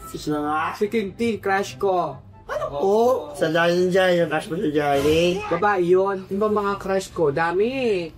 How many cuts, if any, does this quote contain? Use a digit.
2